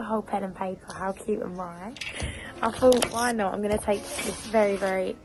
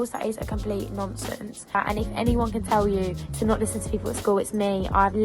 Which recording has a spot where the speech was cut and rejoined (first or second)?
second